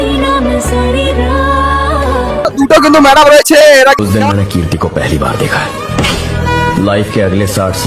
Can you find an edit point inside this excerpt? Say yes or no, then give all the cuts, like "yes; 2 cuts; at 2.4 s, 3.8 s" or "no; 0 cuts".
yes; 1 cut; at 4.0 s